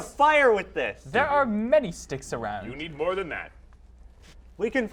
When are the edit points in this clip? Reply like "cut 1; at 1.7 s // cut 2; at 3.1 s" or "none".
none